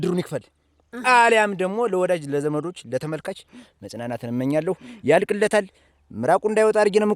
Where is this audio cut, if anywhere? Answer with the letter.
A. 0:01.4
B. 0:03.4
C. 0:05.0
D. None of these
D